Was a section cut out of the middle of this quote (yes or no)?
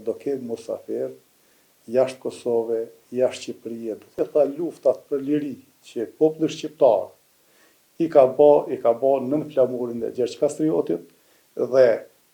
yes